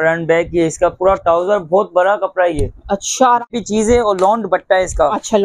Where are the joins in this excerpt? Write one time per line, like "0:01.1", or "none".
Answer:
0:03.4